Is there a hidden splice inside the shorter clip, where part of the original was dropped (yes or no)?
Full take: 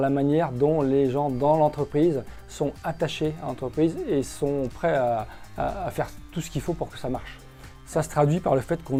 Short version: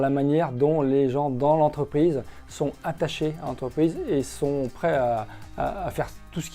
no